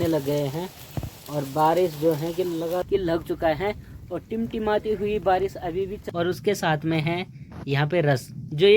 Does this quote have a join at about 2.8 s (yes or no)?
yes